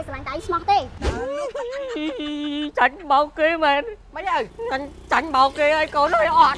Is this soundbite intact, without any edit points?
no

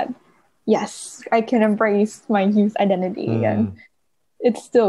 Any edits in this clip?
no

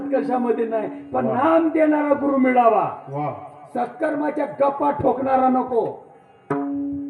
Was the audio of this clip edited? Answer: no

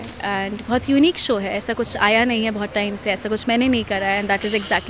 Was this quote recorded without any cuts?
yes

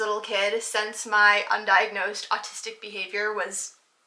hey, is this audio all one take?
yes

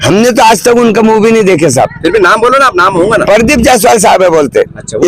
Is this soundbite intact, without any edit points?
yes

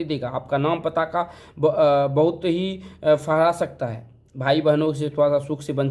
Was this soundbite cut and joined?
no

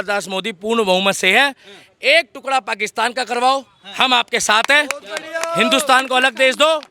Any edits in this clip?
no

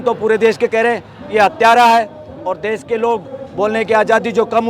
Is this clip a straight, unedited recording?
yes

